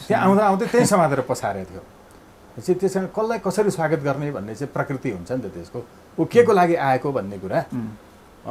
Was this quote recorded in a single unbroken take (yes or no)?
yes